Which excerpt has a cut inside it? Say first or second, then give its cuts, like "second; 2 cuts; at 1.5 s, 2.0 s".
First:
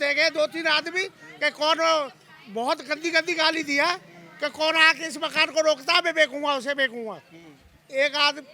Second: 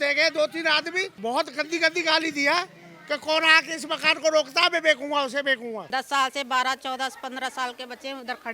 second; 2 cuts; at 1.1 s, 5.8 s